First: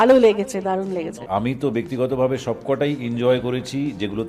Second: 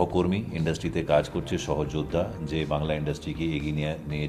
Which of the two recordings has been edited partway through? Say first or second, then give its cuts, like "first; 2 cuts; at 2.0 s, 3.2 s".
first; 1 cut; at 1.2 s